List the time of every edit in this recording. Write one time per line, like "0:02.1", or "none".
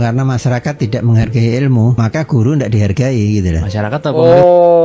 none